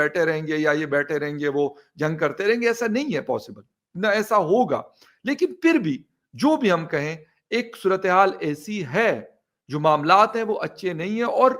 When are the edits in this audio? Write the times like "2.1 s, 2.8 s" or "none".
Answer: none